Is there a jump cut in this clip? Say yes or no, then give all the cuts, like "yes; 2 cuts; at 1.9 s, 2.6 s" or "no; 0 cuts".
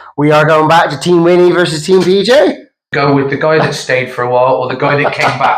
yes; 1 cut; at 2.9 s